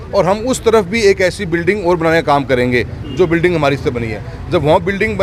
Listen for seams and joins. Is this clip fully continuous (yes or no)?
yes